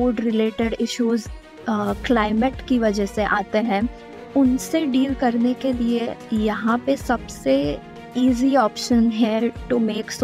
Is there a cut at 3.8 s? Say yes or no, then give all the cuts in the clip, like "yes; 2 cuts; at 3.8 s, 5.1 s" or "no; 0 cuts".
no; 0 cuts